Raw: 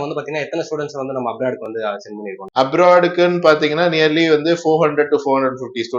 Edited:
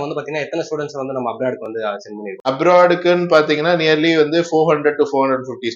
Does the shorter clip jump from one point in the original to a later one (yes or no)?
yes